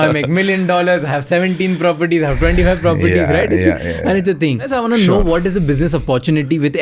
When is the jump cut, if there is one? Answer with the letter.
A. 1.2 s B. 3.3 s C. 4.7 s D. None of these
C